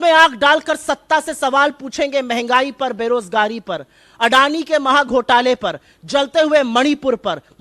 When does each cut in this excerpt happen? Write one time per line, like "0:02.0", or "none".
none